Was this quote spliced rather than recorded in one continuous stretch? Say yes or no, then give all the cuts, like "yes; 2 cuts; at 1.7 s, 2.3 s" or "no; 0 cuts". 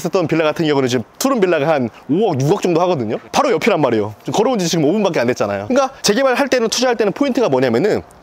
no; 0 cuts